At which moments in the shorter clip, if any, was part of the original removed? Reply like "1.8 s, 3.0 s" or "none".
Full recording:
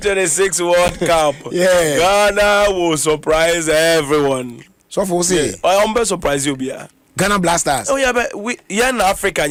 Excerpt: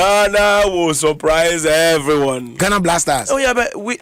2.5 s